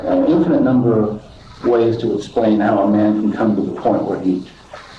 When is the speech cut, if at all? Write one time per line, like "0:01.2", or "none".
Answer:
none

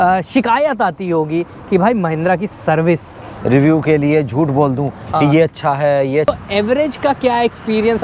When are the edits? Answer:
0:03.3
0:06.3

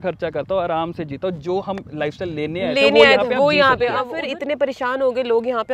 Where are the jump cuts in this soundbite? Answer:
0:04.2

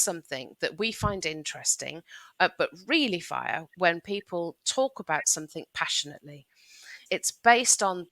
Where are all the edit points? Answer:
0:07.0

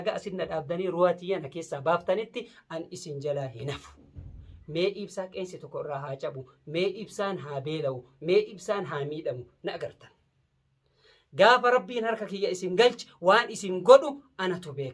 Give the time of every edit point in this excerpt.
none

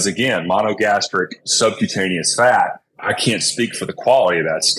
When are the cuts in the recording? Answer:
0:01.4
0:03.0

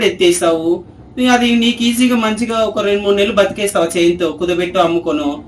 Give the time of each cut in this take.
none

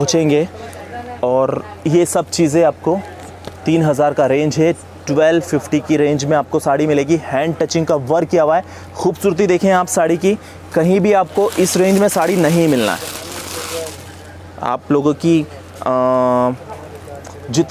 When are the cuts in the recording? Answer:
none

